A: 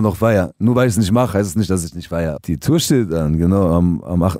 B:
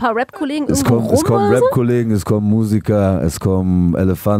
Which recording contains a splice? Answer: A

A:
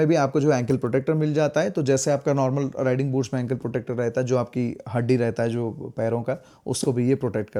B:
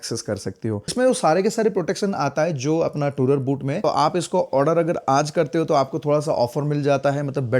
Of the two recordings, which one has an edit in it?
B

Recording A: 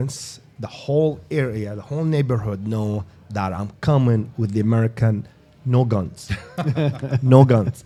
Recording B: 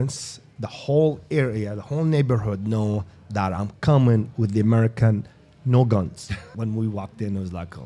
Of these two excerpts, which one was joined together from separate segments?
B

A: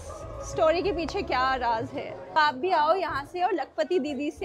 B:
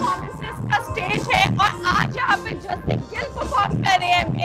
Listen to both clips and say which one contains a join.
A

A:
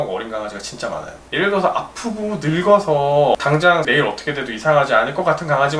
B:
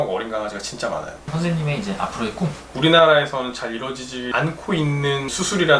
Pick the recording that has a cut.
B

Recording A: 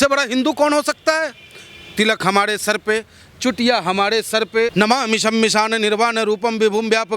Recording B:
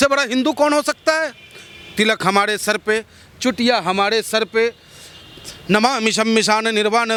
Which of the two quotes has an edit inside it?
A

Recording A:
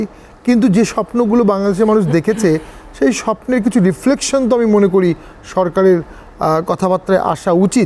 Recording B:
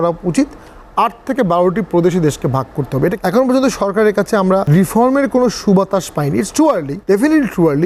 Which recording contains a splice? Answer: B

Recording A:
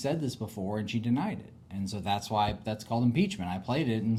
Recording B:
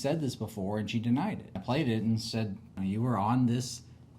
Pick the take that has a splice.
B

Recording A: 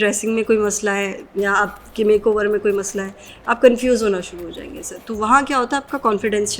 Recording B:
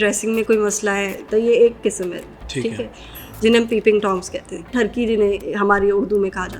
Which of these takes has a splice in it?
B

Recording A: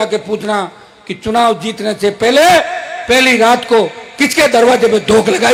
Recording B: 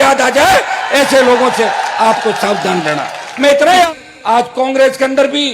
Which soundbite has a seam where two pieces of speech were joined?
B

